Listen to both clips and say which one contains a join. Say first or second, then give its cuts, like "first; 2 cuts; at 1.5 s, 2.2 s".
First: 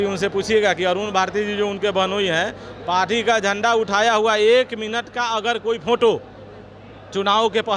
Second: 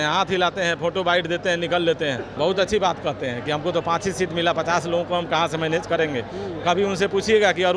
second; 1 cut; at 2.3 s